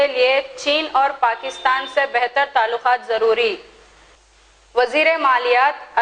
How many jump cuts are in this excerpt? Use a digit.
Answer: 0